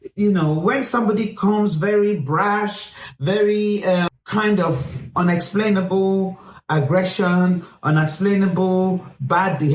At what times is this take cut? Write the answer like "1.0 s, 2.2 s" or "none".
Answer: 4.1 s

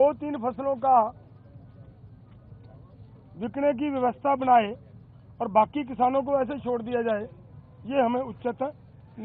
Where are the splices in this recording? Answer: none

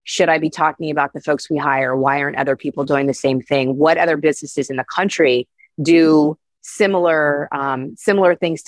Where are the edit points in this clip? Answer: none

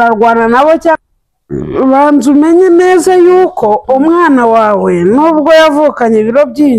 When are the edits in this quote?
1.0 s

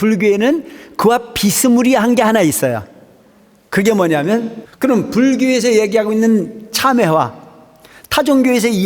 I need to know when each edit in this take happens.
4.6 s

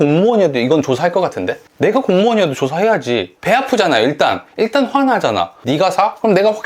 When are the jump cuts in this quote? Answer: 5.5 s

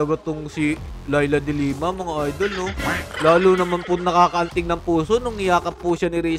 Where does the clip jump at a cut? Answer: none

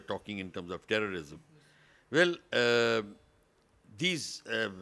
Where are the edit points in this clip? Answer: none

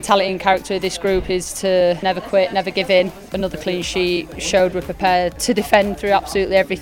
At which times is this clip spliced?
2.0 s, 3.3 s, 4.3 s, 5.4 s

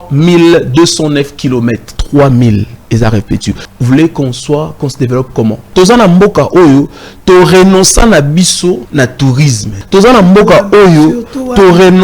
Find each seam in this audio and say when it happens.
1.9 s, 3.7 s, 5.6 s, 8.9 s, 9.7 s

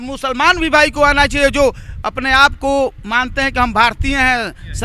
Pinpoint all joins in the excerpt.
none

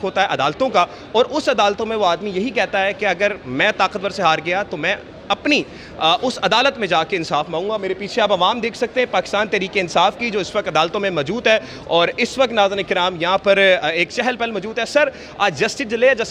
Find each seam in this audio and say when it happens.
none

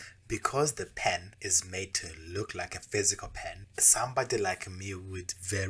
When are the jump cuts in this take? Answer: 1.0 s, 3.7 s

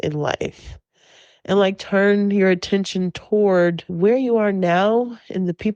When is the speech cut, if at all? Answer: 3.9 s

